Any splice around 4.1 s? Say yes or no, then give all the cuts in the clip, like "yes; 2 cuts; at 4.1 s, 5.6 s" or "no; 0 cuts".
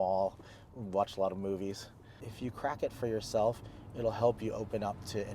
no; 1 cut; at 2.2 s